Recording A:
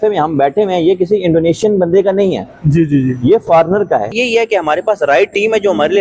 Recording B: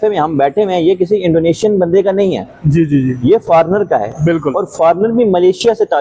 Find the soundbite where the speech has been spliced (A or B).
A